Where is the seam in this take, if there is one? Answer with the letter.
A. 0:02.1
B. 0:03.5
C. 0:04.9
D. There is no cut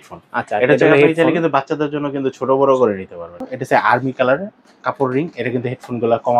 B